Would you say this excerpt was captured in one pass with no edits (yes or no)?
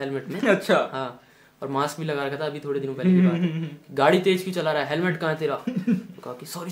yes